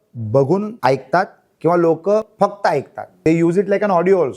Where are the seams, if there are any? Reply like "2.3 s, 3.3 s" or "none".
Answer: 1.2 s, 2.6 s